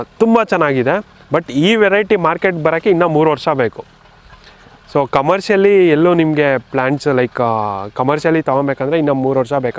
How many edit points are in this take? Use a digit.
0